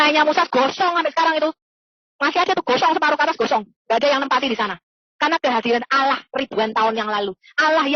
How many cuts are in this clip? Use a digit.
0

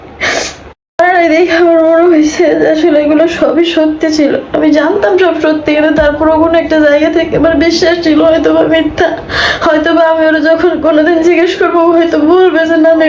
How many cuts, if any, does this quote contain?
1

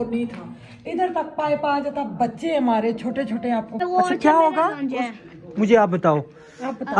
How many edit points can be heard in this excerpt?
1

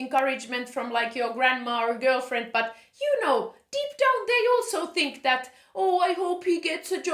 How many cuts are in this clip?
0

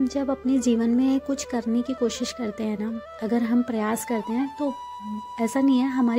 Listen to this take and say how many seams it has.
0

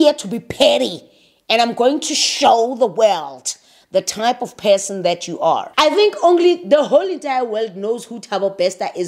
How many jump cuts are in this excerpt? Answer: 1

